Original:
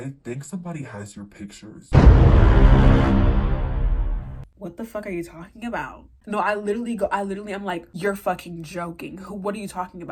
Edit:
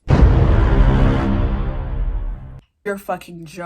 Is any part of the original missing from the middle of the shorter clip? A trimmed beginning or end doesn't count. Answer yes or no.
yes